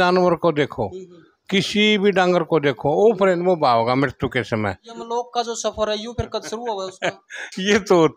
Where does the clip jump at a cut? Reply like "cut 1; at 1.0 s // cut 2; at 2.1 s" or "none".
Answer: cut 1; at 4.9 s